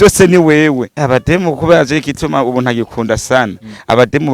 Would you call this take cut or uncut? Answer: cut